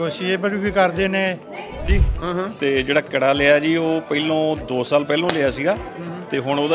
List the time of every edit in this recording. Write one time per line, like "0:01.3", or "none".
0:01.9